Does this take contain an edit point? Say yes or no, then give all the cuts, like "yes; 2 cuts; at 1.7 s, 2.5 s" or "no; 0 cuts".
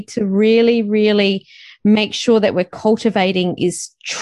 no; 0 cuts